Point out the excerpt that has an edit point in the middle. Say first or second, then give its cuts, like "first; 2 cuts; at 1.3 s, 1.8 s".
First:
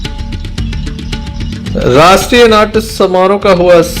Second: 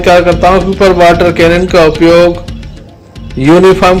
first; 1 cut; at 1.2 s